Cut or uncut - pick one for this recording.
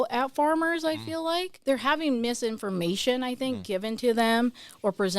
cut